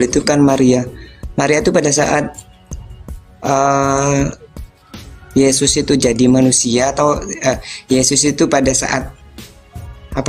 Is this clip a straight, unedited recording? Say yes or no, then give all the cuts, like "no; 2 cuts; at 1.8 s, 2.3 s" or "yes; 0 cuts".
yes; 0 cuts